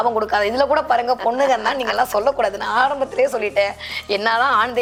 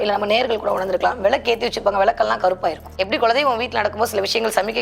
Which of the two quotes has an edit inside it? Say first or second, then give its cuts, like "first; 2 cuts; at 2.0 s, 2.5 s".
second; 1 cut; at 2.9 s